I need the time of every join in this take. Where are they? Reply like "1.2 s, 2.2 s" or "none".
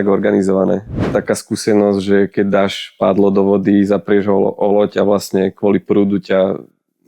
1.1 s